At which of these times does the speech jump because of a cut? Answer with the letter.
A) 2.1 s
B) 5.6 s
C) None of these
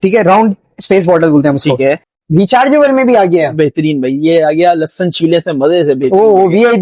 A